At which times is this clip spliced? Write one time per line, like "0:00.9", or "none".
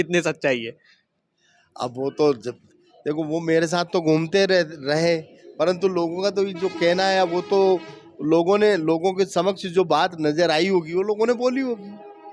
none